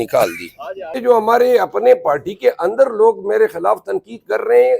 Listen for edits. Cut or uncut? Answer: cut